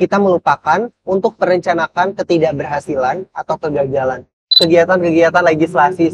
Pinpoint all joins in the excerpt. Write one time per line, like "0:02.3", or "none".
0:04.6